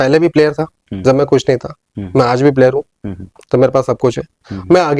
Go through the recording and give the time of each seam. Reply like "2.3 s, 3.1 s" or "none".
none